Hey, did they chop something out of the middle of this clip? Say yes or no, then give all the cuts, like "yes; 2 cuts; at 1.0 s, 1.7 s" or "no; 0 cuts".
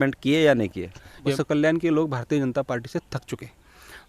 yes; 1 cut; at 1.3 s